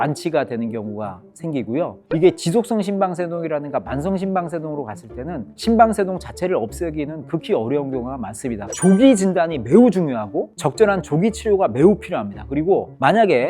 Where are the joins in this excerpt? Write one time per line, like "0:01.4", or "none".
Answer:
0:08.7

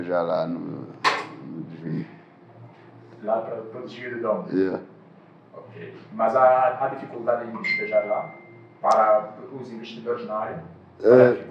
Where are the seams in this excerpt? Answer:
none

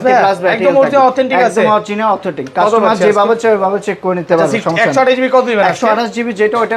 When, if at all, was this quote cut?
none

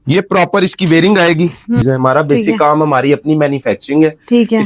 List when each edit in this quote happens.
0:01.8

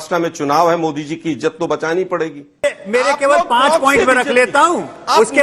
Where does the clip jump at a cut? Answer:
0:02.6

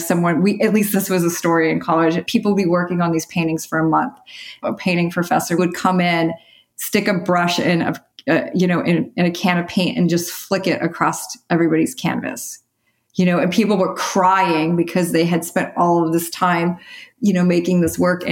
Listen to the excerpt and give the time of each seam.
0:00.9
0:02.2
0:04.6
0:05.6

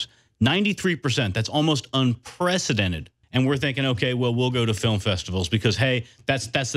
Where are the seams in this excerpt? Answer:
0:03.2

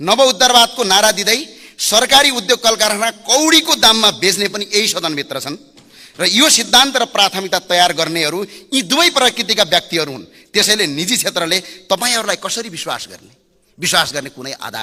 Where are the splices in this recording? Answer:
none

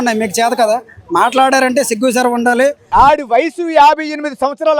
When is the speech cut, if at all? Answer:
0:02.8

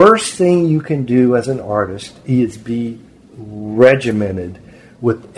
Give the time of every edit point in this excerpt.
none

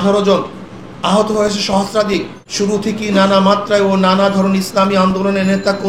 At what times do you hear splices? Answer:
0:02.4

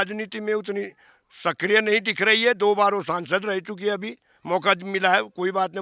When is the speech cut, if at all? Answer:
none

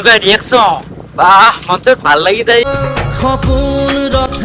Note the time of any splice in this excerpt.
0:02.6

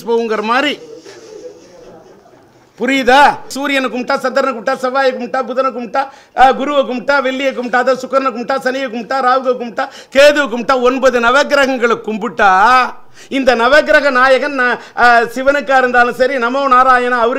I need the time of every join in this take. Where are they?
0:03.5

